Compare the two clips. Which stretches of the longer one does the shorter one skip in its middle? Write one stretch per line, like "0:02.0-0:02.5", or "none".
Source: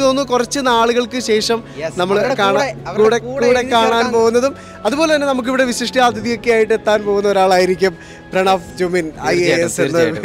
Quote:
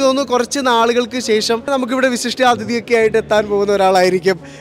0:01.7-0:05.2